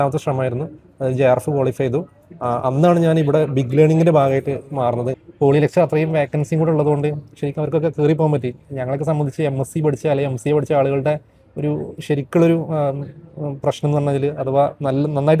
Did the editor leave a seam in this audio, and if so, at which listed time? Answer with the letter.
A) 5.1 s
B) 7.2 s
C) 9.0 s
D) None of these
A